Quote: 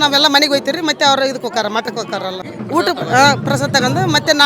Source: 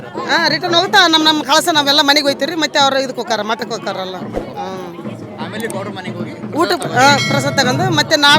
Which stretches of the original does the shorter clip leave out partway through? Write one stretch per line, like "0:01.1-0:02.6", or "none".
0:04.2-0:06.3